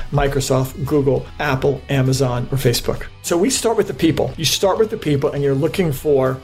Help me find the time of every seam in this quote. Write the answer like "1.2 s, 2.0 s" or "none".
1.3 s, 3.2 s, 4.3 s